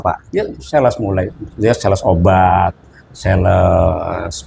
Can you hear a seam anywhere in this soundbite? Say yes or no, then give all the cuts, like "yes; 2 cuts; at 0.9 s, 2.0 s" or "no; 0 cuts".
no; 0 cuts